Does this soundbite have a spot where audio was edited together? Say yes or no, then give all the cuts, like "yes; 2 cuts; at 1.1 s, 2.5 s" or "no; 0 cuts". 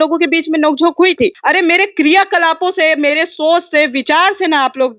yes; 1 cut; at 1.4 s